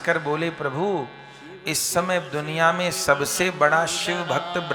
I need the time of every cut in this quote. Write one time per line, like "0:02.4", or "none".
none